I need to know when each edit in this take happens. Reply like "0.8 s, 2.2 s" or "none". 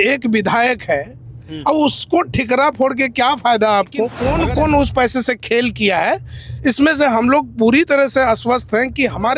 4.2 s